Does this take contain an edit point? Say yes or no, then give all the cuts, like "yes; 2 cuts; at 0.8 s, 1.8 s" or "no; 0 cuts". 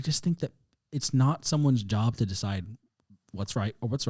no; 0 cuts